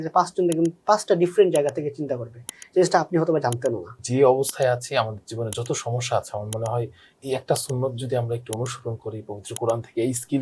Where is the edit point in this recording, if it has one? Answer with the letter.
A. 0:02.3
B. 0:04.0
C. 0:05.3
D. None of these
B